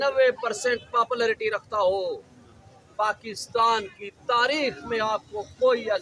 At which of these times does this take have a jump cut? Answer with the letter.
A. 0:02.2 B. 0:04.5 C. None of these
C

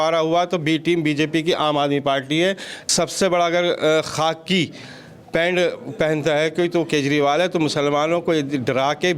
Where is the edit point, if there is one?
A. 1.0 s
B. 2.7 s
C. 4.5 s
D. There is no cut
B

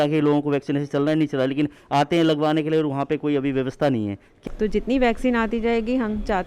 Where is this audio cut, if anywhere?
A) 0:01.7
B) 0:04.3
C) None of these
B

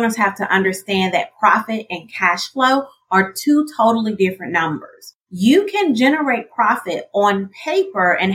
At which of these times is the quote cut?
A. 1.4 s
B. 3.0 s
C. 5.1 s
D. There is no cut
C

